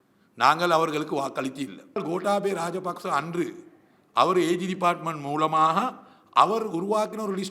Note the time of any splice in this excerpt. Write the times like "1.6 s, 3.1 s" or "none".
2.0 s